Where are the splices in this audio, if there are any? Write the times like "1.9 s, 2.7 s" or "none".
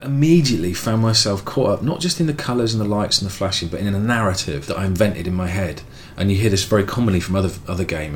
4.6 s